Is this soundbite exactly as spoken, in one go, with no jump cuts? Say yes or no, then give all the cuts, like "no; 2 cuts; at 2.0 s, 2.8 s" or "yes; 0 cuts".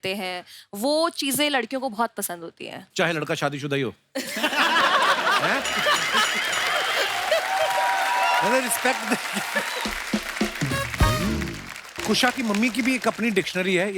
no; 1 cut; at 12.0 s